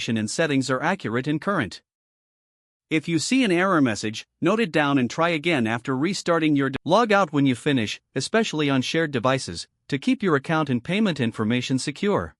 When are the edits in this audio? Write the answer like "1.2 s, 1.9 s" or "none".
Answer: 6.8 s